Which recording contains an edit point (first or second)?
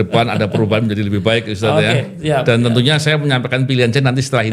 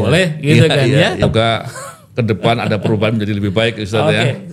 second